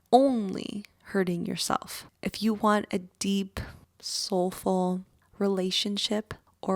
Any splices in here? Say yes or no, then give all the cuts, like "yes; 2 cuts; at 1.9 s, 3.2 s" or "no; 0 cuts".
yes; 1 cut; at 5.2 s